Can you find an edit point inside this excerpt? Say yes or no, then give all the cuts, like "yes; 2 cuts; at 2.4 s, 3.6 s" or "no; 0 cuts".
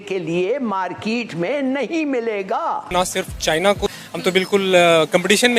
yes; 2 cuts; at 2.9 s, 3.9 s